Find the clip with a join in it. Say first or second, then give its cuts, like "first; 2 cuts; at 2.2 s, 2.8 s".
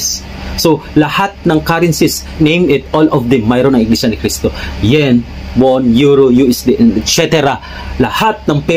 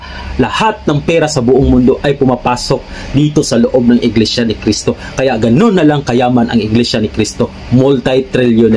first; 1 cut; at 2.3 s